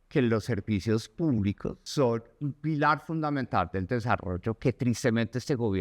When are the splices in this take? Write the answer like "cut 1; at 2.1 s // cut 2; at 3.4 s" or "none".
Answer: cut 1; at 1.8 s